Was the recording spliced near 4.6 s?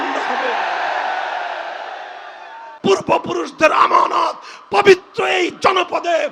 no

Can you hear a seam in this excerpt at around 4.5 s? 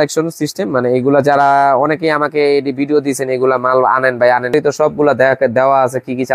yes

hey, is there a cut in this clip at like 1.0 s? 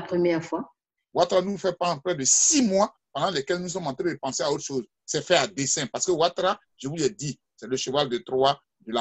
yes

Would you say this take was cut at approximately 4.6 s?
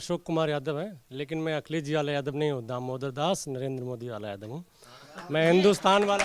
no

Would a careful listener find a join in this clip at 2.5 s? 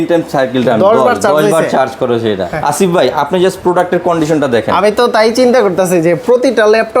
yes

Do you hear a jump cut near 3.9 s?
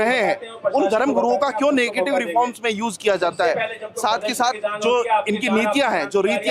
no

